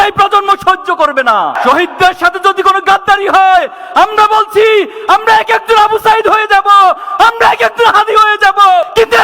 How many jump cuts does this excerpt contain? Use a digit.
1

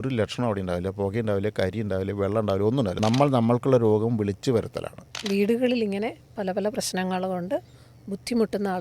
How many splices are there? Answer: 2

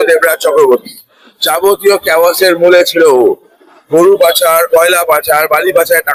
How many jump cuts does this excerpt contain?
0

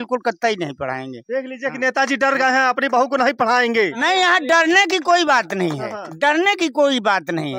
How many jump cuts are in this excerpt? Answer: 0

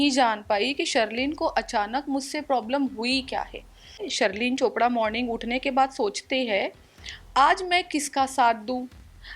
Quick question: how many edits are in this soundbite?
1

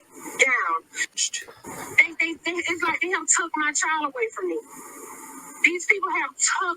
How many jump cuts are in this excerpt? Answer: 1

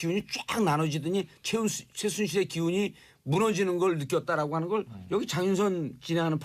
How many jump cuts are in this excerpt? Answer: 1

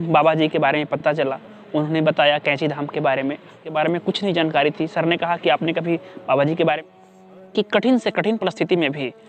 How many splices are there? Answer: 1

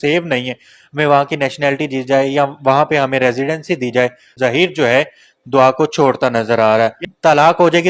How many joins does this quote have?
2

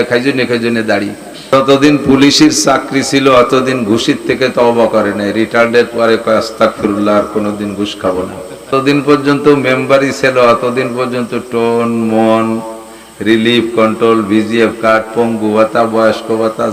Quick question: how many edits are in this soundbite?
2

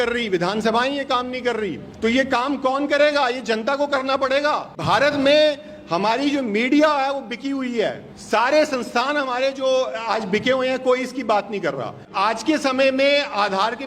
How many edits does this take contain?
4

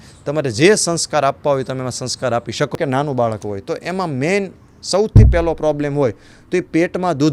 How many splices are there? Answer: 1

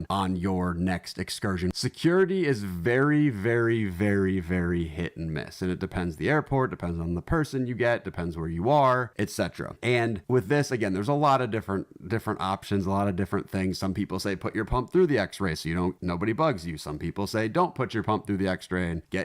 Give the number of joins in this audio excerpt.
1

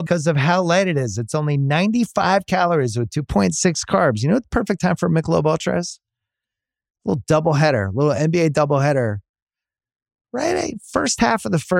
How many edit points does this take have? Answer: 0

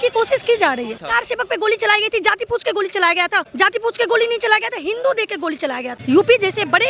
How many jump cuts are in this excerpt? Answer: 3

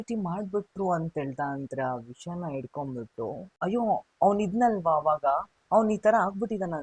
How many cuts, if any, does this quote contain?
1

